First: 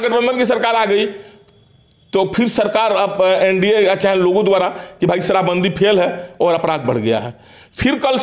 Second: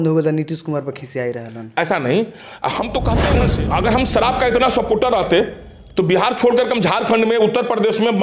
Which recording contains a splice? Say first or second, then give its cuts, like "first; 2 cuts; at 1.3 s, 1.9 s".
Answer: second; 1 cut; at 3.2 s